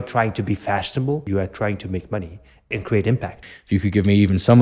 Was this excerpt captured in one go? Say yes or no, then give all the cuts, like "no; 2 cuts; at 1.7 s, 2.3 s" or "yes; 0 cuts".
no; 3 cuts; at 1.2 s, 2.7 s, 3.5 s